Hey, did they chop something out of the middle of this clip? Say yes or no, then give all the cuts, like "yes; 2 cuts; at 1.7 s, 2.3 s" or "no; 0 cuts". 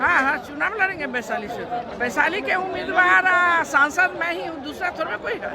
yes; 1 cut; at 1.9 s